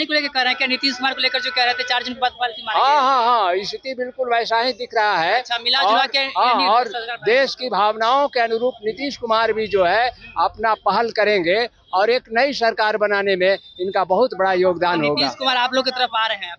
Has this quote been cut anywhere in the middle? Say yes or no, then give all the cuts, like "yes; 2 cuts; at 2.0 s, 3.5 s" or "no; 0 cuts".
no; 0 cuts